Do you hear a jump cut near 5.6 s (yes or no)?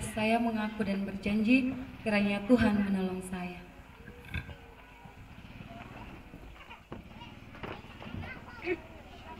no